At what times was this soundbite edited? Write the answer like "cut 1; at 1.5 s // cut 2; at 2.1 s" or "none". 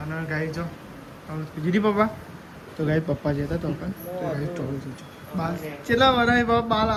none